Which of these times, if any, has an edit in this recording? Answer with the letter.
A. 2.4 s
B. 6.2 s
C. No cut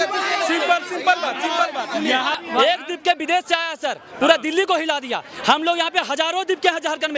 A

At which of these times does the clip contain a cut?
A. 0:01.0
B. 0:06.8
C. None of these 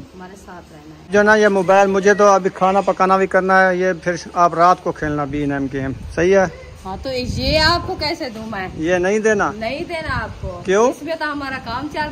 A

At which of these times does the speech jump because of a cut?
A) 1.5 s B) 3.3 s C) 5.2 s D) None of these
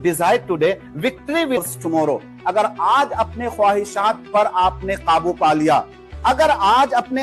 A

